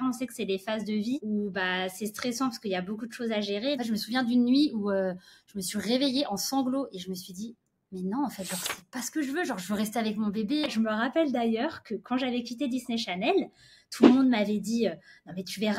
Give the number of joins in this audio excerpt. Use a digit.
3